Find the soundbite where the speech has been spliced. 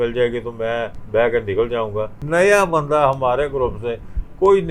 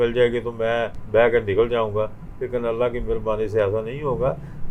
first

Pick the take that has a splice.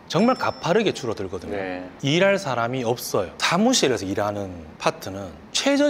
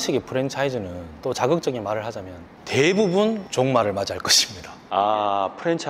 first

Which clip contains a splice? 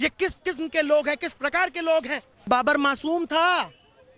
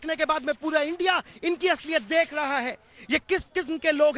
first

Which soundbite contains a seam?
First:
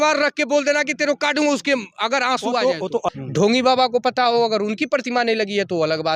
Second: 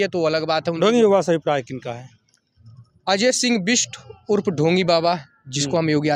first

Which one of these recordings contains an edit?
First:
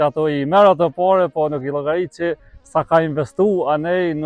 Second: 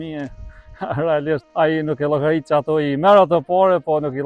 second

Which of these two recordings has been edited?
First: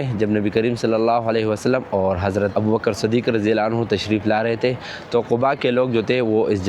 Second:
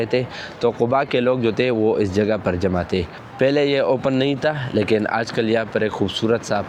second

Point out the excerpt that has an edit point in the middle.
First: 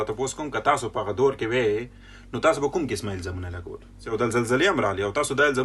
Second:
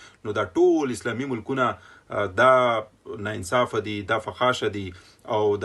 first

